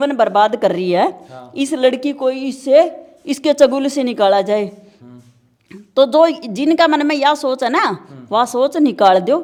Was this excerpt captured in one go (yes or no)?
yes